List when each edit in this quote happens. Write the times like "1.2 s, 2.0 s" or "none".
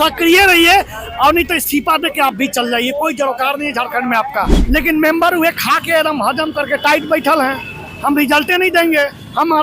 4.6 s